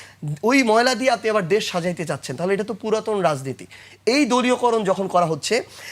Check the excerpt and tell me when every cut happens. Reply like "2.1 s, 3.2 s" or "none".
none